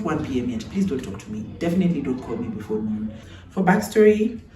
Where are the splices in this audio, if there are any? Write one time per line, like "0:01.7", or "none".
0:03.3